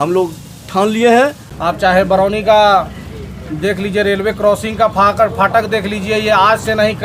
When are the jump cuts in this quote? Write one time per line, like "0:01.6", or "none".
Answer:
0:01.5